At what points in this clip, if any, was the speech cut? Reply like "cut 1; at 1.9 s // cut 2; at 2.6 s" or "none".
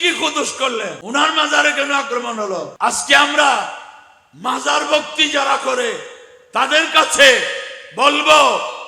cut 1; at 1.0 s // cut 2; at 2.7 s